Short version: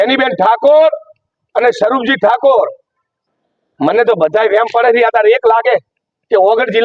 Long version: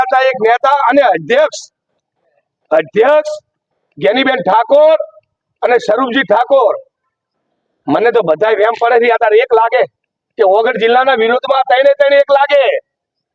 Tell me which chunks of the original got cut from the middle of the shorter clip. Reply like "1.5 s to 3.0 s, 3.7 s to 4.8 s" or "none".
none